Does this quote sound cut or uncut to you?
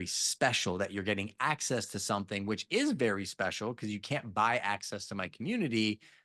uncut